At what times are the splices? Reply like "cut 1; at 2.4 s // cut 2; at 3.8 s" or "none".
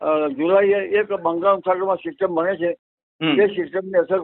none